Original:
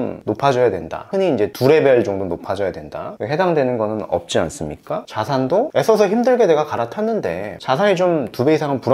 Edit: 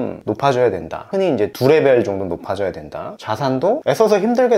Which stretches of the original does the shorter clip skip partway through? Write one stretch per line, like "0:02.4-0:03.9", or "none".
0:03.2-0:05.1